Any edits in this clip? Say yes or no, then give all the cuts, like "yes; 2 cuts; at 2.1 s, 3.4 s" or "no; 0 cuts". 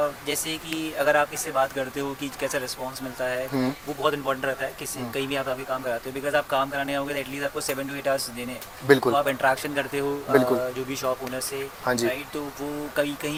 no; 0 cuts